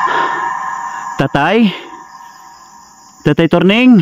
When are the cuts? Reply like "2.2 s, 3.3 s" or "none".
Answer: 1.0 s